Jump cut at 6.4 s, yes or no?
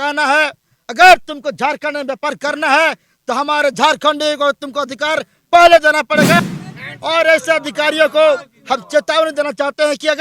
yes